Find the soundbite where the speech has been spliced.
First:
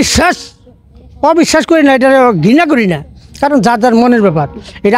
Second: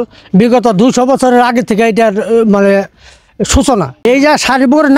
second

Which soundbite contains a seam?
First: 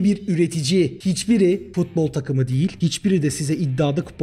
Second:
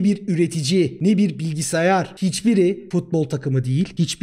first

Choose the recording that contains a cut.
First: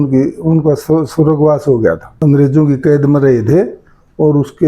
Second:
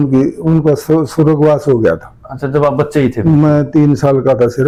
first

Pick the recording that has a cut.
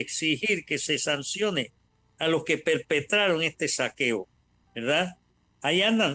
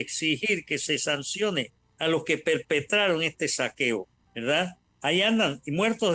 second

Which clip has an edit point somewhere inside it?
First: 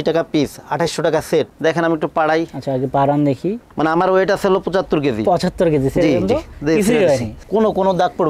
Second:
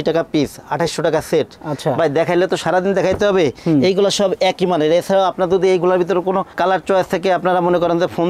first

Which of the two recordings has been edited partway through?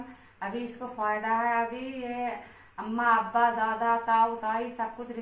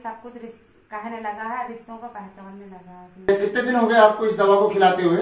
second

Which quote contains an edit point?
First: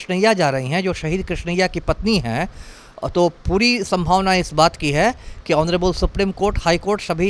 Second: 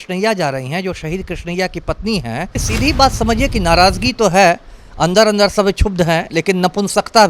second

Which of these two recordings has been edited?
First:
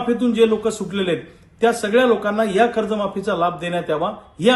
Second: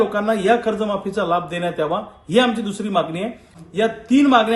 second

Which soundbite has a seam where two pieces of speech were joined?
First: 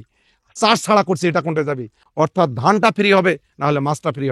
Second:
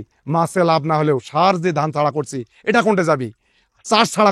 first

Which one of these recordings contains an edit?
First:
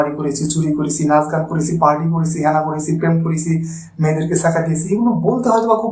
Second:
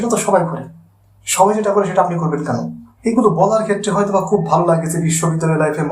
second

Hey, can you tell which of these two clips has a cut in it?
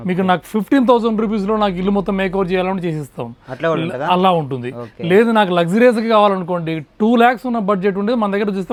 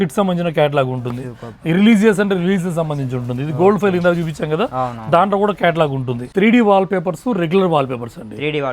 second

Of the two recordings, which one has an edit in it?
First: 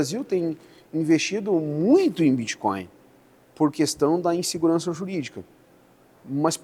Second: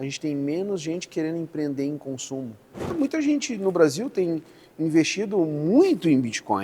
second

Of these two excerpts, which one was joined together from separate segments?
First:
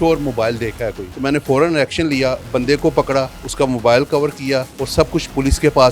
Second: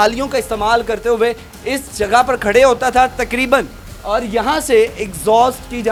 first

